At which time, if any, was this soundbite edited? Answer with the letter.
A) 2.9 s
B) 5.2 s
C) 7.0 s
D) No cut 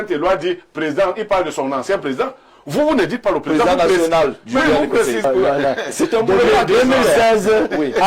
B